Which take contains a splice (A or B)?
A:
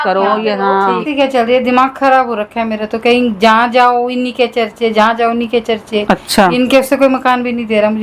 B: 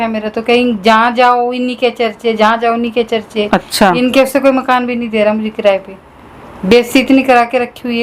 A